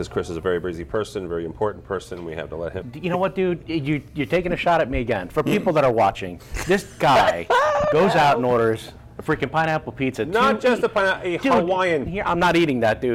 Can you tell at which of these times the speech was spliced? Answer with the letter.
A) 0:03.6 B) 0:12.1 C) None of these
B